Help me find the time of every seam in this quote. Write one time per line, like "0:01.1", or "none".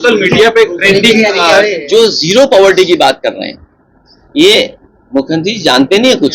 0:01.8